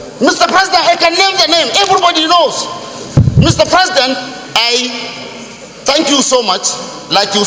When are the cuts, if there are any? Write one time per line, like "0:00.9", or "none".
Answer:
none